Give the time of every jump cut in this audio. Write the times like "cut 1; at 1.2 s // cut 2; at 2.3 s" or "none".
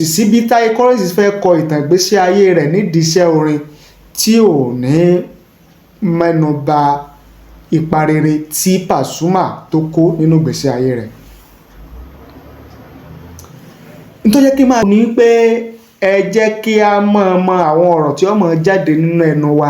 cut 1; at 14.8 s